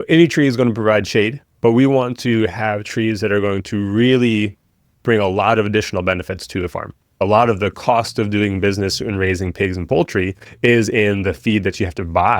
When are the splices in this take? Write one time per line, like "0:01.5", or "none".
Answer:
0:07.1